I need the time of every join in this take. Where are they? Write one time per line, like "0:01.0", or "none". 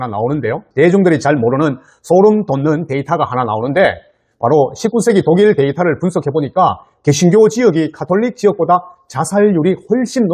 none

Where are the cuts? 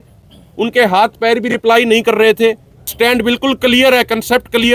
0:02.9

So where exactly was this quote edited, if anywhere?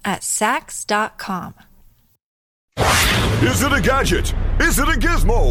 0:02.5

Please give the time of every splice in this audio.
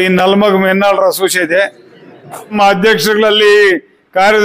0:02.6

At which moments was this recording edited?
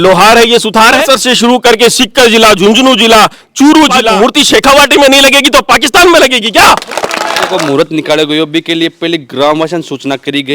0:01.0
0:04.0
0:07.5

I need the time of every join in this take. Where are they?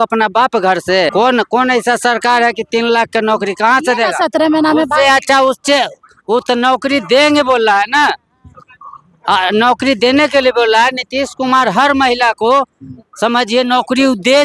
0:01.1

